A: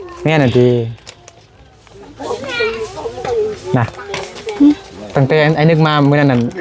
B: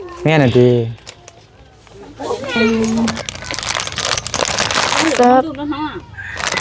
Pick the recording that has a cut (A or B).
B